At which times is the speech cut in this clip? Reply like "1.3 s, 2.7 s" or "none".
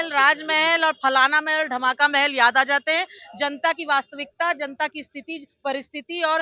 none